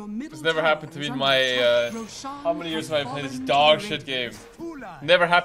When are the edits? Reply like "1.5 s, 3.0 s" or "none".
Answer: none